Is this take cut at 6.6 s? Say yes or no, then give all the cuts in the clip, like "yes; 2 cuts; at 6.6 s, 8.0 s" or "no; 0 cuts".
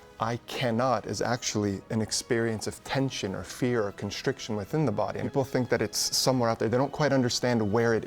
no; 1 cut; at 5.2 s